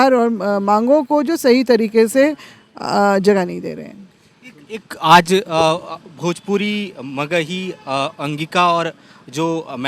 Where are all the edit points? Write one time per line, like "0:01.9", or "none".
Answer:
none